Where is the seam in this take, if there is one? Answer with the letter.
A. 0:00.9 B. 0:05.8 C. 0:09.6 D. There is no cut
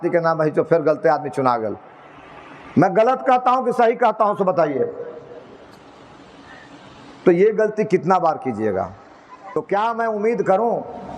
C